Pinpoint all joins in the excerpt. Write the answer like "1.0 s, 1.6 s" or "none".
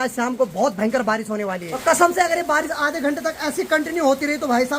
1.7 s